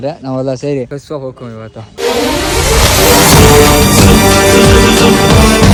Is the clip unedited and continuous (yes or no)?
yes